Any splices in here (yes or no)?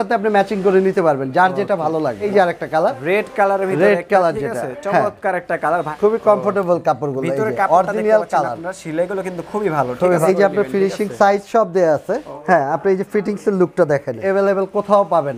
yes